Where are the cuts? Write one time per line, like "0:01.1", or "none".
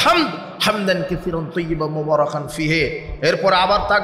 none